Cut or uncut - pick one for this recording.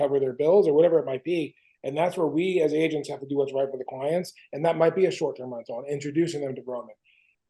uncut